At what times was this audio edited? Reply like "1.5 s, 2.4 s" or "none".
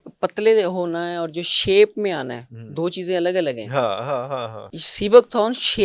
4.6 s